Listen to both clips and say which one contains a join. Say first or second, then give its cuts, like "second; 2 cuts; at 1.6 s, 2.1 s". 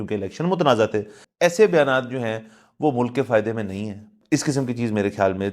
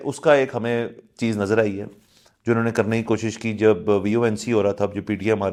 first; 2 cuts; at 1.2 s, 4.1 s